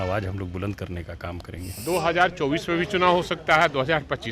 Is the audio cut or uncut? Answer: cut